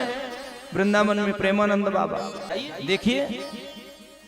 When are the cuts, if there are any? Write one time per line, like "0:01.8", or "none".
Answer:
0:02.5